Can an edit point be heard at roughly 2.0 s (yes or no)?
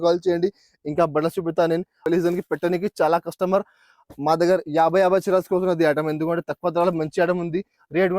yes